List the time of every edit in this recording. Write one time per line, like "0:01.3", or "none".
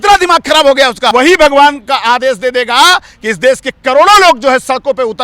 0:01.1